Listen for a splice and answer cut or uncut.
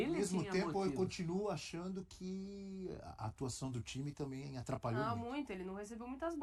uncut